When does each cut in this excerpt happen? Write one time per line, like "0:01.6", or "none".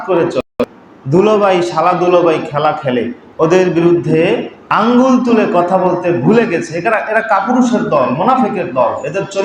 0:03.2
0:04.6

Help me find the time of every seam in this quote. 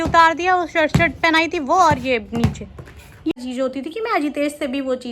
0:03.3

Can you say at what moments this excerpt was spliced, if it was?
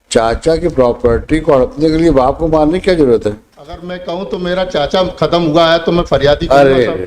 0:03.9

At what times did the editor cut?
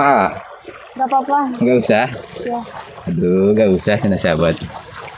none

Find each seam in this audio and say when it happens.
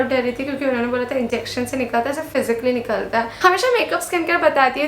0:03.4

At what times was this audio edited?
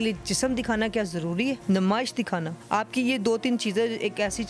0:01.6
0:02.5

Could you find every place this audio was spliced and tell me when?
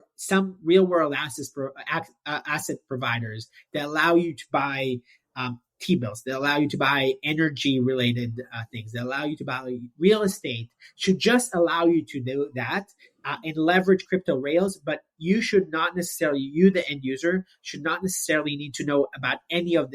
none

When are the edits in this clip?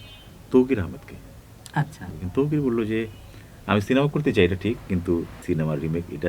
0:02.1
0:05.3

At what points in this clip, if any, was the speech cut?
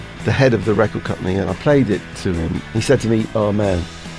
0:01.5
0:02.6

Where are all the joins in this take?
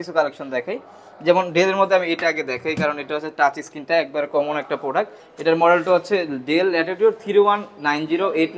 none

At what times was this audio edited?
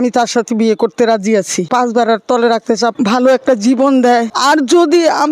0:01.7
0:02.9
0:04.3

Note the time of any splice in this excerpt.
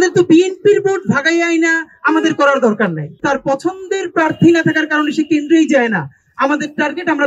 0:03.2

